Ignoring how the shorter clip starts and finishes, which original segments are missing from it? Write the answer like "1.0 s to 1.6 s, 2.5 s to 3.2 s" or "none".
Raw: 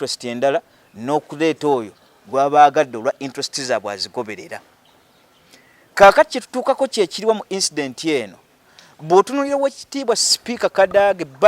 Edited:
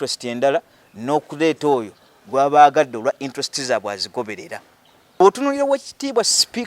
5.2 s to 9.1 s